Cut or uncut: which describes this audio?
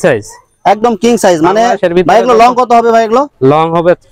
uncut